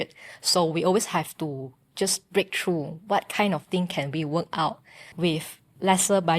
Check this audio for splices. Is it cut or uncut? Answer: cut